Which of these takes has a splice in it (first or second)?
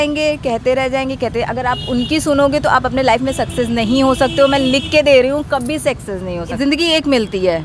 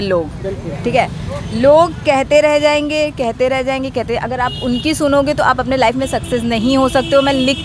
first